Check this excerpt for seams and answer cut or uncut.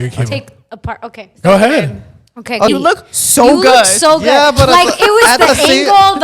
cut